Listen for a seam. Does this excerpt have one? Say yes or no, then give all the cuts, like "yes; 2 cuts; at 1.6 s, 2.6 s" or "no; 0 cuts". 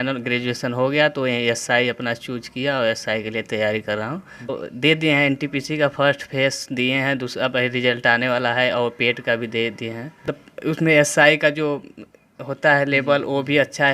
yes; 2 cuts; at 4.5 s, 10.2 s